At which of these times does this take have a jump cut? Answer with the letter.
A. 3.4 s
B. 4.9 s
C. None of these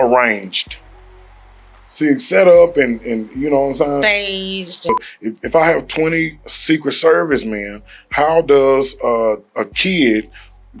B